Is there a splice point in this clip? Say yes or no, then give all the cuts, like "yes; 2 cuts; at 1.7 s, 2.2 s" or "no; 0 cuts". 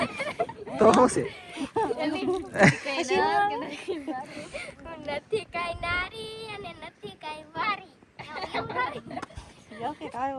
no; 0 cuts